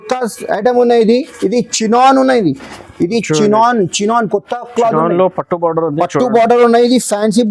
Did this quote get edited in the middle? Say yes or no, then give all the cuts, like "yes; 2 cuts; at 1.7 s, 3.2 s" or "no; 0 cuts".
no; 0 cuts